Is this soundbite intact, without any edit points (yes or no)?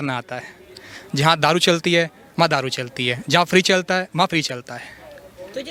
yes